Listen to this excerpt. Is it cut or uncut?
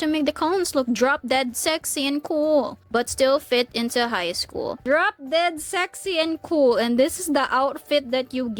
uncut